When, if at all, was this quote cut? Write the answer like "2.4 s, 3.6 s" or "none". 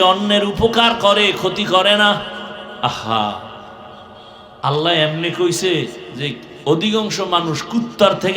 2.7 s

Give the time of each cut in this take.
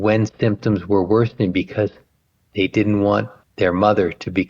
3.4 s

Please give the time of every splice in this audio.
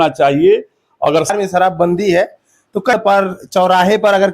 1.3 s, 2.9 s

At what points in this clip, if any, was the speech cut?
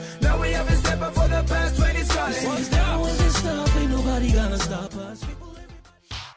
none

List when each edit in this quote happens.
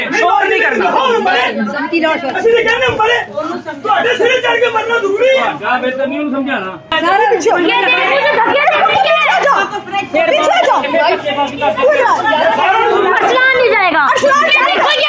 6.9 s

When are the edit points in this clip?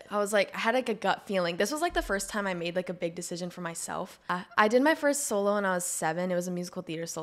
4.3 s

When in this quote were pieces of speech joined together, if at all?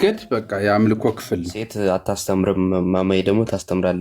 1.6 s

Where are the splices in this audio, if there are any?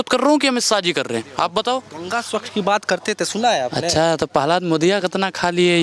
2.0 s

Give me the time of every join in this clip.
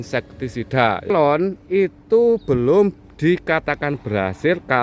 1.1 s

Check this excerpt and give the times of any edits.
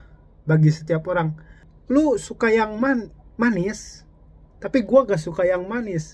1.7 s

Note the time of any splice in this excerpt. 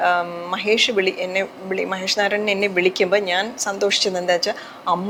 none

